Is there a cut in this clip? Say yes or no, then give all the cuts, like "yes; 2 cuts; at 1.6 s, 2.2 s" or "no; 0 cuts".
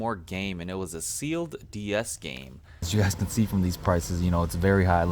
yes; 1 cut; at 2.9 s